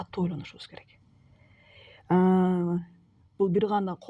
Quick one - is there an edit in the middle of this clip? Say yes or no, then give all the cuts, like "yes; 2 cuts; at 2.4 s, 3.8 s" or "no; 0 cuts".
no; 0 cuts